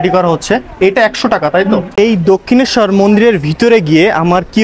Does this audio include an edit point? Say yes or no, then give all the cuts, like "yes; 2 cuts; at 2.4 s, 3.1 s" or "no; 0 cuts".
yes; 1 cut; at 1.9 s